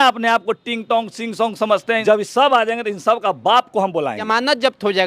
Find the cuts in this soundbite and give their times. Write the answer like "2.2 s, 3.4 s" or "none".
2.0 s, 4.2 s